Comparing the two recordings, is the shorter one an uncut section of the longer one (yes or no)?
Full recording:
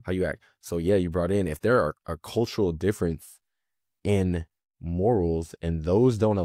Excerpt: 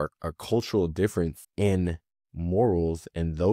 no